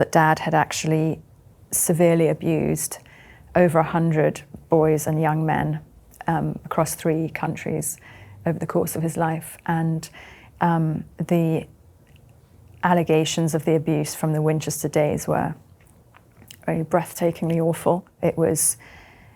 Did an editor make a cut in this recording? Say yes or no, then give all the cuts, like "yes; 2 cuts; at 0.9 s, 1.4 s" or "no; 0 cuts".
no; 0 cuts